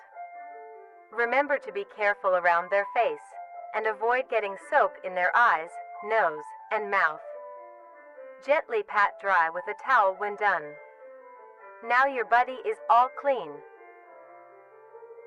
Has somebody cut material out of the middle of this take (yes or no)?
no